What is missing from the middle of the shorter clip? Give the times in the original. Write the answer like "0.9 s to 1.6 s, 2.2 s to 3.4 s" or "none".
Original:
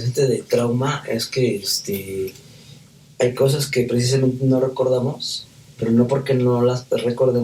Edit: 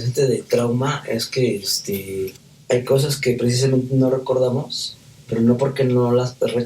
2.5 s to 3.0 s